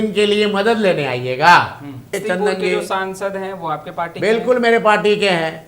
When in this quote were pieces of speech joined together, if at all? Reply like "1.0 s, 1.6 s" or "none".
2.2 s